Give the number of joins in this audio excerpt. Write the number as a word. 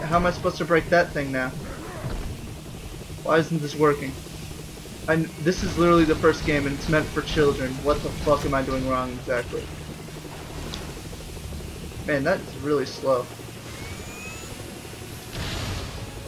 one